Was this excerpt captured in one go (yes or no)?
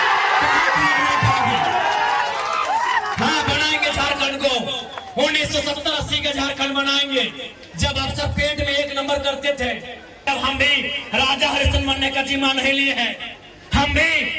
no